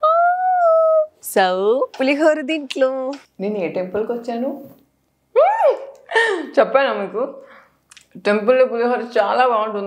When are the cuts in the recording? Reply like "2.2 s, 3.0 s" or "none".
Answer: 1.2 s, 3.3 s